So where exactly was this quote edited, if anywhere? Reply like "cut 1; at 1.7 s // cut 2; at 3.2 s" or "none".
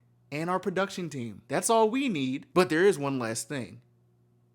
cut 1; at 1.4 s // cut 2; at 2.4 s